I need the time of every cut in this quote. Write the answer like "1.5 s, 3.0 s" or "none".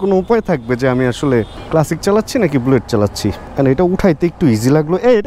none